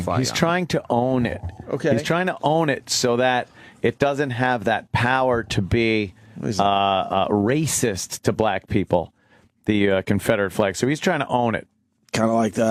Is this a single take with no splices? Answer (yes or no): yes